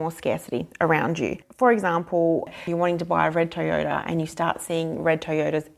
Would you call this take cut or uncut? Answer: cut